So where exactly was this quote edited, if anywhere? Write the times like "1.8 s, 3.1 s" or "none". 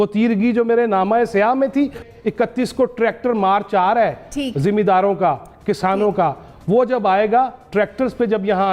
2.0 s